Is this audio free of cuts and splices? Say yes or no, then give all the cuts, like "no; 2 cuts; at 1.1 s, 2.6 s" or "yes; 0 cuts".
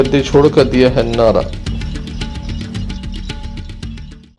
yes; 0 cuts